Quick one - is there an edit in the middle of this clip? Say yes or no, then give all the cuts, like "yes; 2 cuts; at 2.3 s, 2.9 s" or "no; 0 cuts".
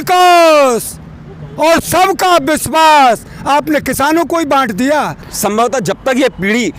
yes; 1 cut; at 5.3 s